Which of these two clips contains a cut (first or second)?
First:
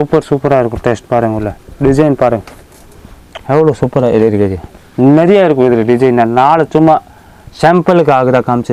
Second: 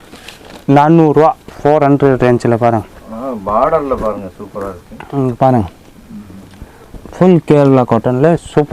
second